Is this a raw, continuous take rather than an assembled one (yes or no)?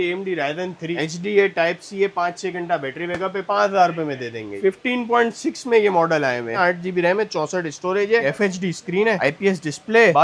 no